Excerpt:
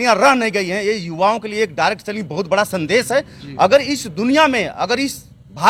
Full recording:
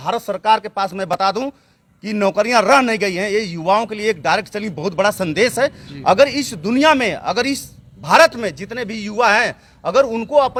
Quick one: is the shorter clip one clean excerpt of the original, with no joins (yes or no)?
yes